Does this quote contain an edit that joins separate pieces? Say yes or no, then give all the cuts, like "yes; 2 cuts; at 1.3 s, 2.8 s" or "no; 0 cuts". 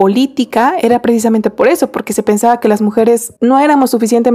yes; 1 cut; at 3.3 s